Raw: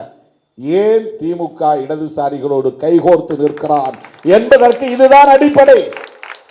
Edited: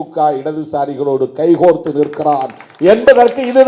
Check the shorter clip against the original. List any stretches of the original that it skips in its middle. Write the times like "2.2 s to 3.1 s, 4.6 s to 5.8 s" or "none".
none